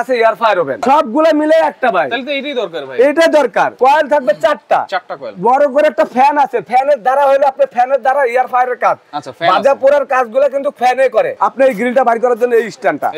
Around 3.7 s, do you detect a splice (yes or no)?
yes